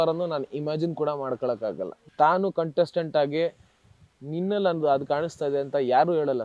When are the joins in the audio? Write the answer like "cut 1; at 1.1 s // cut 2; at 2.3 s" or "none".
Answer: cut 1; at 2.0 s

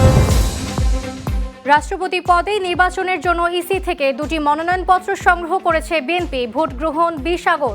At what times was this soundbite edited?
cut 1; at 1.5 s

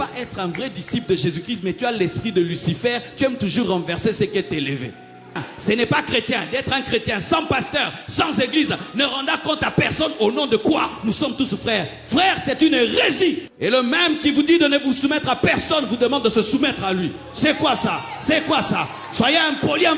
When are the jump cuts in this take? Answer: cut 1; at 5.5 s // cut 2; at 13.5 s

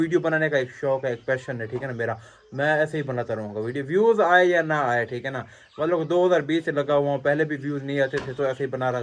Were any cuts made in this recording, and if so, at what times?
none

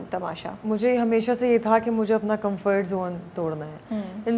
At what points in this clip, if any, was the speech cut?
none

